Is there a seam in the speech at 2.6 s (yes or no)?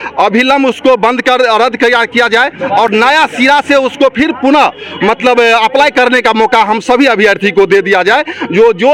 no